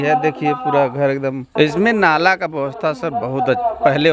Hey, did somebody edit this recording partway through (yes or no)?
yes